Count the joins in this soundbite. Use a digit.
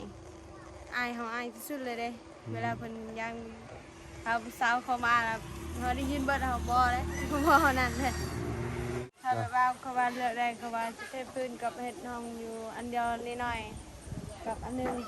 1